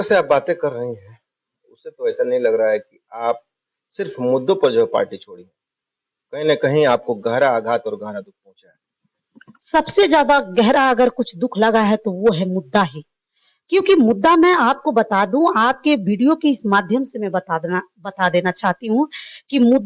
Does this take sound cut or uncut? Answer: uncut